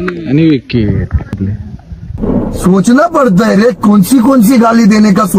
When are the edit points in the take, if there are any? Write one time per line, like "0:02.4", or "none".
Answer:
0:01.3